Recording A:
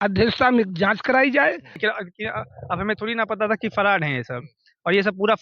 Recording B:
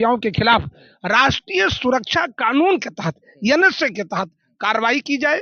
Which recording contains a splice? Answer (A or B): A